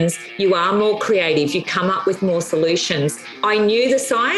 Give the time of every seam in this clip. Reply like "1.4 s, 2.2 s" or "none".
3.3 s

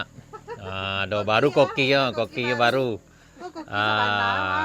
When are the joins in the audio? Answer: none

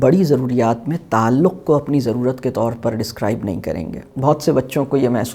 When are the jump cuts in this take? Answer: 4.1 s

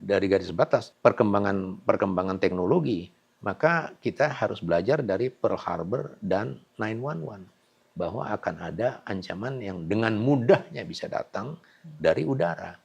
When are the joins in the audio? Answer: 0.9 s

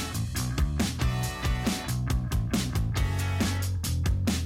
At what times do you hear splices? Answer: 2.3 s

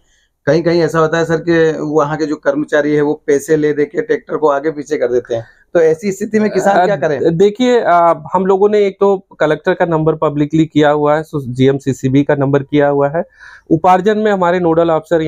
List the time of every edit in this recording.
none

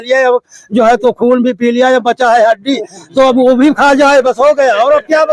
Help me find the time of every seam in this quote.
none

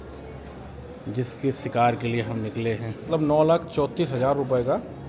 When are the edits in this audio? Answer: 3.1 s

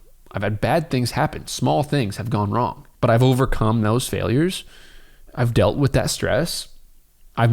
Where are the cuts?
none

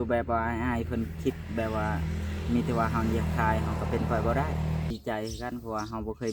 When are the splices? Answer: 4.9 s

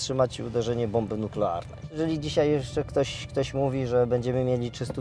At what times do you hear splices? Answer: 1.9 s

